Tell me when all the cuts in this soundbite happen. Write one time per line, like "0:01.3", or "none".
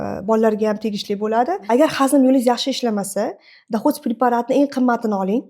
0:01.6